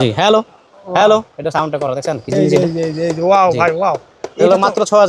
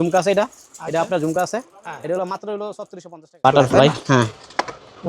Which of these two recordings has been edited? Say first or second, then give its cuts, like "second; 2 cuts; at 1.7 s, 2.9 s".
second; 1 cut; at 3.4 s